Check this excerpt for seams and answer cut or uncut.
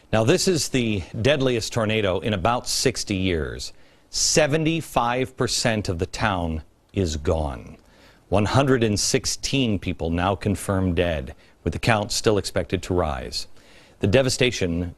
cut